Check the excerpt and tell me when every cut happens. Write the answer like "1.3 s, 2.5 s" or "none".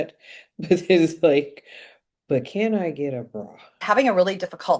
3.8 s